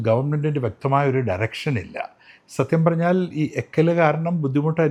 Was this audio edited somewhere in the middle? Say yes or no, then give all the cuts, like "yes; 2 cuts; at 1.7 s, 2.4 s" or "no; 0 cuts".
no; 0 cuts